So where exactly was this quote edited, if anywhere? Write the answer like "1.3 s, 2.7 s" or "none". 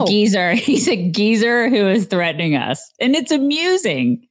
none

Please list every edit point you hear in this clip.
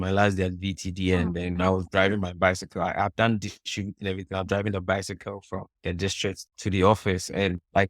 none

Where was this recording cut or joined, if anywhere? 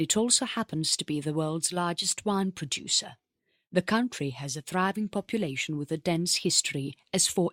2.6 s

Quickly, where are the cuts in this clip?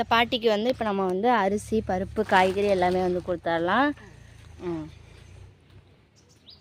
none

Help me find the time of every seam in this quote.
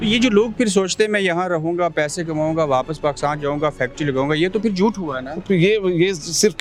none

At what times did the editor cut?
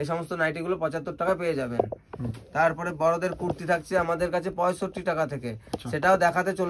none

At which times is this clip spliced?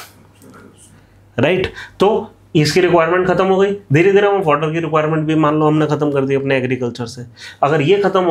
none

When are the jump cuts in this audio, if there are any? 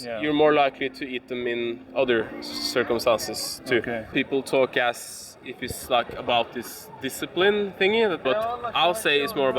4.1 s, 8.2 s

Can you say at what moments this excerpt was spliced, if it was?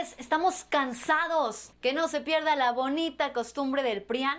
1.6 s

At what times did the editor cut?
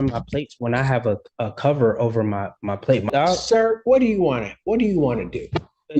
3.1 s

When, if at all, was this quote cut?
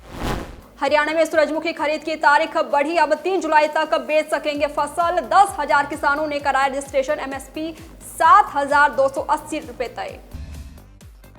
10.3 s

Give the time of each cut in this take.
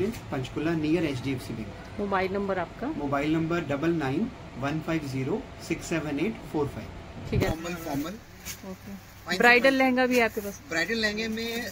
7.5 s

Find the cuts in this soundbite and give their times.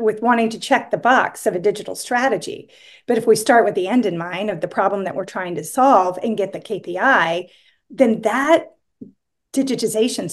none

